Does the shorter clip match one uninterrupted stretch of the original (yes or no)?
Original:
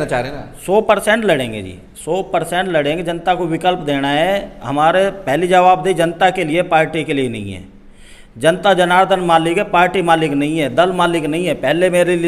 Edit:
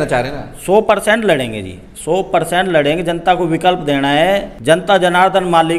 no